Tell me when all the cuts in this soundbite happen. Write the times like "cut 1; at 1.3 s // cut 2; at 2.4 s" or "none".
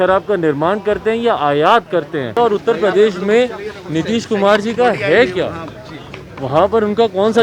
cut 1; at 2.2 s

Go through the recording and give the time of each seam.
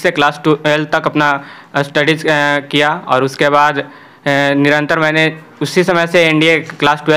none

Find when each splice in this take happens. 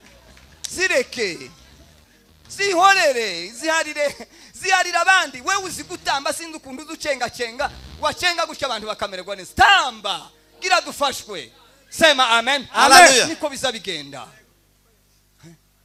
none

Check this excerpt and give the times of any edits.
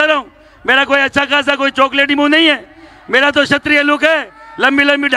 none

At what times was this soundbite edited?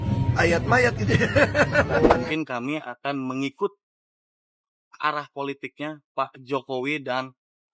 cut 1; at 2.2 s

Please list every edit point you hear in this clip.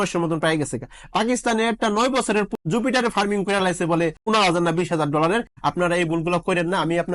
cut 1; at 2.5 s // cut 2; at 4.2 s // cut 3; at 5.5 s

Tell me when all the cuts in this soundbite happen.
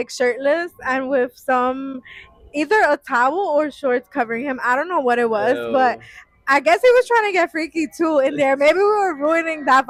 none

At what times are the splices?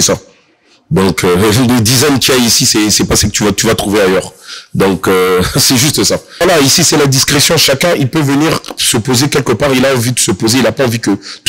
cut 1; at 6.4 s

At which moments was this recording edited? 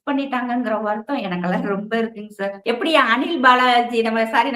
cut 1; at 2.6 s

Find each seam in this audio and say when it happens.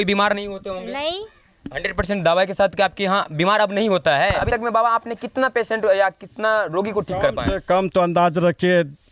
cut 1; at 4.5 s

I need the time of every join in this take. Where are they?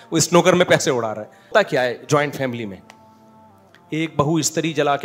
cut 1; at 1.5 s

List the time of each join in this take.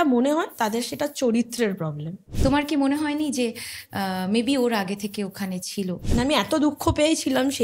cut 1; at 2.2 s // cut 2; at 6.0 s

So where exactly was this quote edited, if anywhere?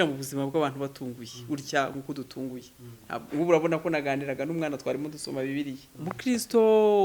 cut 1; at 5.9 s

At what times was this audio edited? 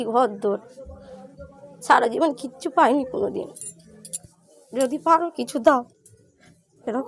none

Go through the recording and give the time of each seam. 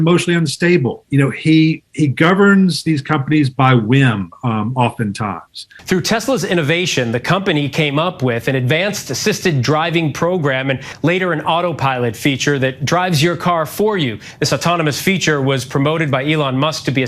cut 1; at 1.0 s // cut 2; at 5.6 s

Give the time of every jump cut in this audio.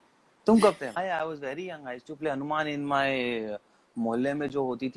cut 1; at 1.0 s

